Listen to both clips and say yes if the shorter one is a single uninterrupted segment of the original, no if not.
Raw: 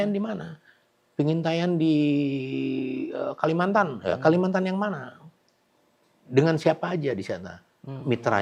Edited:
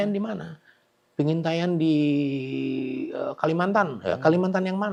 yes